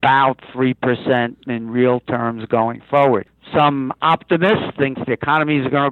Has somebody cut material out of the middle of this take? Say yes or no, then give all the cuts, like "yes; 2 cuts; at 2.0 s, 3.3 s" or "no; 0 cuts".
yes; 1 cut; at 3.4 s